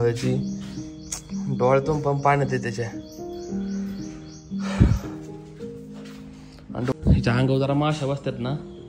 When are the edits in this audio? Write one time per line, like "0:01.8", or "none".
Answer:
0:06.9